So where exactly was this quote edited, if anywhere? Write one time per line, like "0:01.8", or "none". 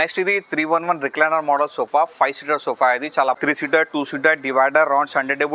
0:03.9